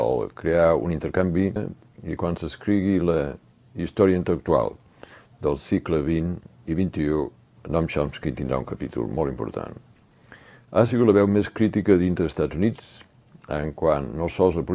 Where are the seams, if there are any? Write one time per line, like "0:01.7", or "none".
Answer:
none